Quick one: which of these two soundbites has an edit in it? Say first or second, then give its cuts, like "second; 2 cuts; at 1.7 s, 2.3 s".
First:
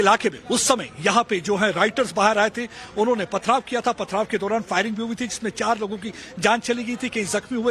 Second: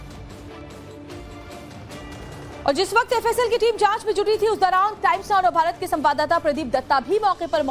first; 1 cut; at 4.3 s